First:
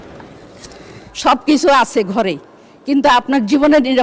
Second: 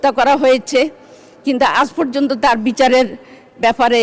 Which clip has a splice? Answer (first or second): first